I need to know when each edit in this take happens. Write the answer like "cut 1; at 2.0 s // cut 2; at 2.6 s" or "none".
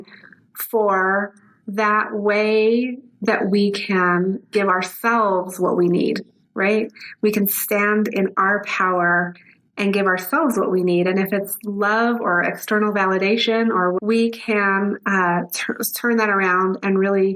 cut 1; at 14.0 s